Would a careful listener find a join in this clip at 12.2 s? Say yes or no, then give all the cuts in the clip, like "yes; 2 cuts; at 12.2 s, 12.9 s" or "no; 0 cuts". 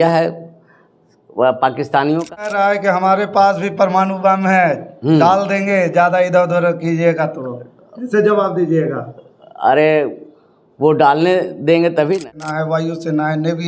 yes; 2 cuts; at 2.5 s, 12.2 s